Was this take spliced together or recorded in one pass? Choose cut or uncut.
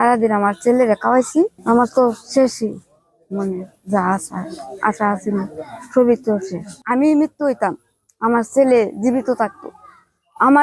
cut